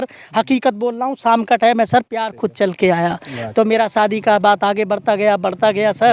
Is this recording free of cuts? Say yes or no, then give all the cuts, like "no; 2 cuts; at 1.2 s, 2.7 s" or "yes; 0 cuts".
yes; 0 cuts